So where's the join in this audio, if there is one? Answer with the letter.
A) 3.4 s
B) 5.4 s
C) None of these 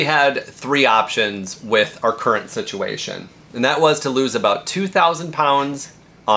C